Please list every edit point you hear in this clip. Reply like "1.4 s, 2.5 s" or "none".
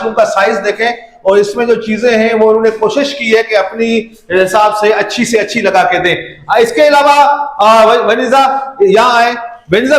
none